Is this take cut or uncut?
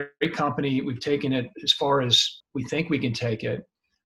cut